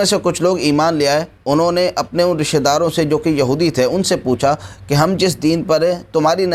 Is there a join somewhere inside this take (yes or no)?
no